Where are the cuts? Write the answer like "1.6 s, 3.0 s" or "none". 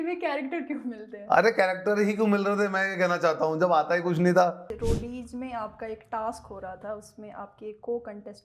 4.7 s